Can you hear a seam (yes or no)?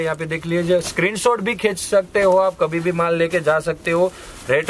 no